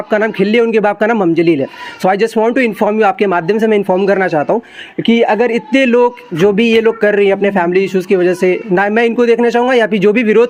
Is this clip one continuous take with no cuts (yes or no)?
yes